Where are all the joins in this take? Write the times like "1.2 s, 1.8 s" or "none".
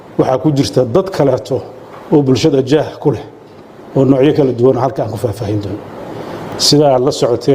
6.5 s